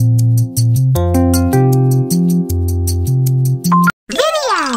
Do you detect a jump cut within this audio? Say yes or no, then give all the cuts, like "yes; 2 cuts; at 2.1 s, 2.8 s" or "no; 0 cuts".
yes; 1 cut; at 3.9 s